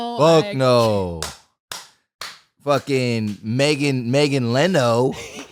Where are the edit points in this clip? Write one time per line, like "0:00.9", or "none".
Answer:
none